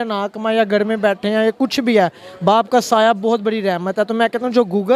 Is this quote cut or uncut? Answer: uncut